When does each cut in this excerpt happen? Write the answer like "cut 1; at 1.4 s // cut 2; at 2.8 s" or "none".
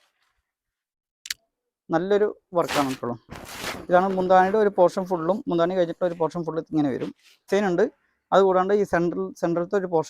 cut 1; at 7.5 s